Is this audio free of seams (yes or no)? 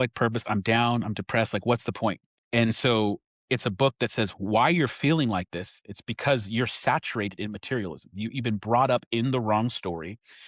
no